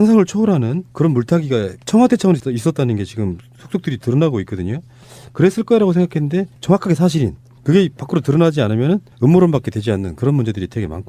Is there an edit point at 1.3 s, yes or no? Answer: yes